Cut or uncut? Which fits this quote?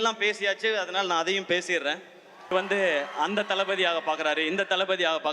cut